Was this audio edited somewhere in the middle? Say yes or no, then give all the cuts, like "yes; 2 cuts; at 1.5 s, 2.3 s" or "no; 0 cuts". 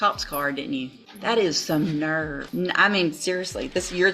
yes; 2 cuts; at 1.0 s, 2.4 s